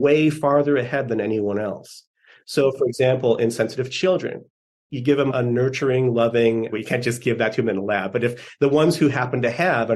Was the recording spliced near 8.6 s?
no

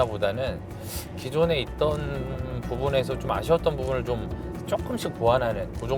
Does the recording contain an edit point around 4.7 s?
no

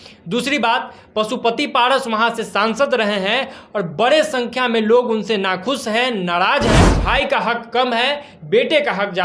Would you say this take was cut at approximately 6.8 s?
yes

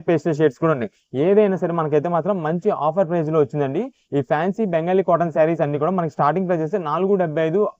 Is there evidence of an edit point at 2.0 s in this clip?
no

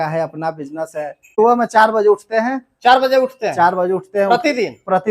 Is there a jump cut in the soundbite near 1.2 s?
yes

